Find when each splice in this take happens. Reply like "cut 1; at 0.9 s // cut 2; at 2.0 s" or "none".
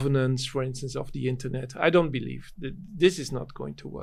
none

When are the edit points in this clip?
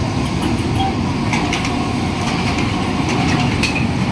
none

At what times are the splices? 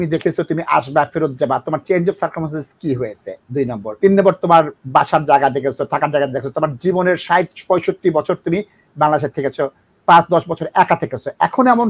cut 1; at 3.9 s

